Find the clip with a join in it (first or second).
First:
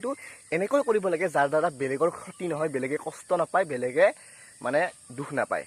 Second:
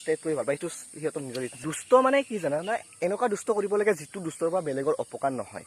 second